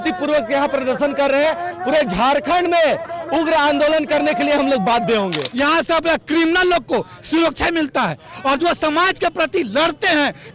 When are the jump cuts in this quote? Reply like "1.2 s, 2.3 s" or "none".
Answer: 5.4 s